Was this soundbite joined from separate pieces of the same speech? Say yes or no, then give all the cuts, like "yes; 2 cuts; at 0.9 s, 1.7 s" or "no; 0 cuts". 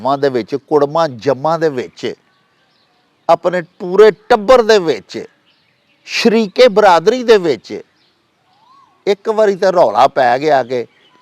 no; 0 cuts